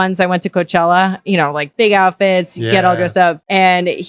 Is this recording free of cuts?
yes; 0 cuts

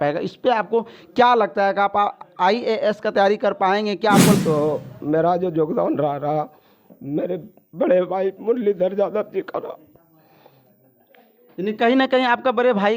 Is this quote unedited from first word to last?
no; 1 cut; at 4.4 s

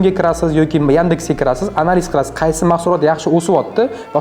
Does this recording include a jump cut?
no; 0 cuts

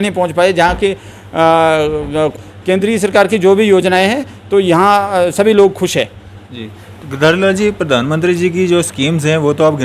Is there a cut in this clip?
yes; 1 cut; at 2.3 s

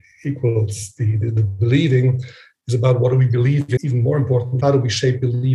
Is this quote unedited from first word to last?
no; 1 cut; at 4.5 s

